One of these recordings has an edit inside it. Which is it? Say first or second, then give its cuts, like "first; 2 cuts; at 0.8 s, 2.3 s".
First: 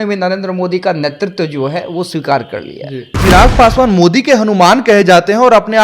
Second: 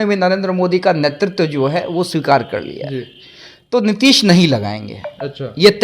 first; 1 cut; at 3.1 s